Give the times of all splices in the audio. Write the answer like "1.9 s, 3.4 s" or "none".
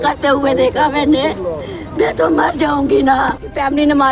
none